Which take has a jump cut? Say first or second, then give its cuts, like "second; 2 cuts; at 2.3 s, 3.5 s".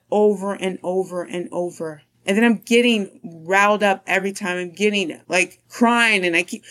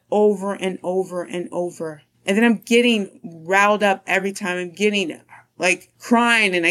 first; 1 cut; at 5.2 s